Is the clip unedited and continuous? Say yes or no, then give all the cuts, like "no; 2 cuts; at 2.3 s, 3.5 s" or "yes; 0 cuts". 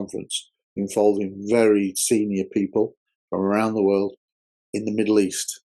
yes; 0 cuts